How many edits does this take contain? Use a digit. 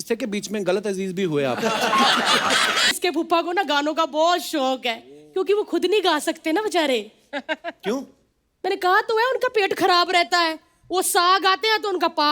1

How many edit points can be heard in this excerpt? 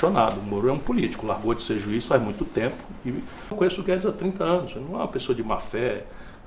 1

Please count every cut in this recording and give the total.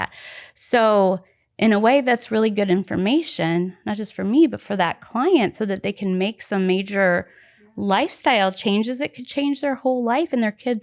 0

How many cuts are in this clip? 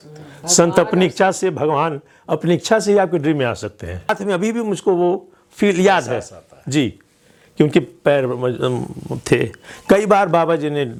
0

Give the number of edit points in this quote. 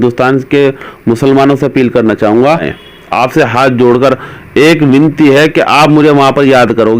1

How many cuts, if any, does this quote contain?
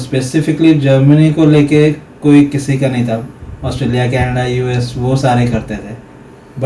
0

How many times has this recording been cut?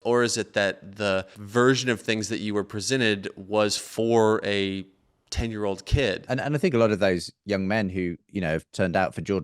2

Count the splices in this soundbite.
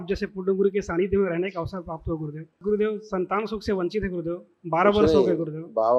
1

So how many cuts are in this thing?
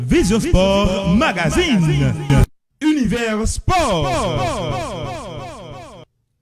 1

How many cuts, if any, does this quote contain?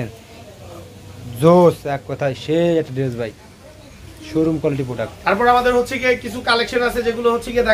0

